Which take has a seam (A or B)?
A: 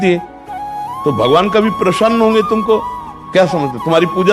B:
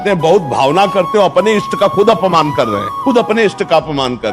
B